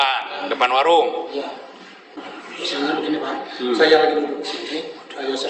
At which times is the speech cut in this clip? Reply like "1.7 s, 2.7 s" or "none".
2.2 s